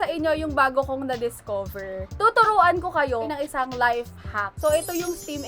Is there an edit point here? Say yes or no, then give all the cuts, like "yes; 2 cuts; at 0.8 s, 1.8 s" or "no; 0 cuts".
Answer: yes; 2 cuts; at 2.1 s, 4.5 s